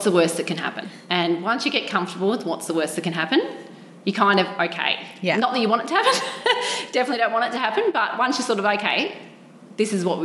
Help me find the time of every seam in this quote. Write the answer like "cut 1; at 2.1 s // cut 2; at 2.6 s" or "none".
cut 1; at 0.9 s